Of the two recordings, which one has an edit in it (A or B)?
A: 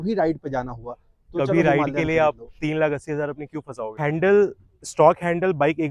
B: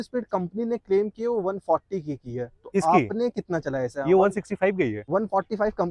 A